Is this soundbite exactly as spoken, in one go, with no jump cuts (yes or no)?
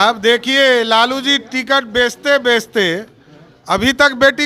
yes